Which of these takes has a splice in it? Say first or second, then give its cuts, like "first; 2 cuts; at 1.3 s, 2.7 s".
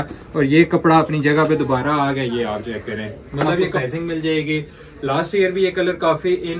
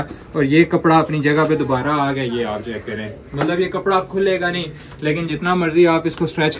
first; 1 cut; at 3.8 s